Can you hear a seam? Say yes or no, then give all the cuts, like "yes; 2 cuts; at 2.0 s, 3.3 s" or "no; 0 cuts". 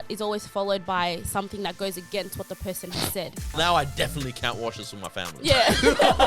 yes; 1 cut; at 3.5 s